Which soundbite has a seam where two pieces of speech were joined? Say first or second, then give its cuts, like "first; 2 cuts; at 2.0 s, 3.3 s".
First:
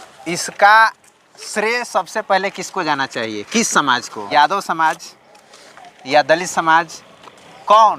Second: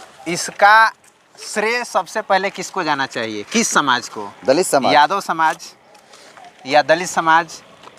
first; 1 cut; at 4.3 s